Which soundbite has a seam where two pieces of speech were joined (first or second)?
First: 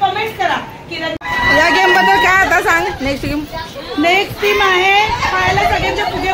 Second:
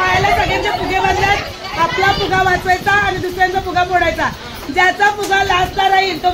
first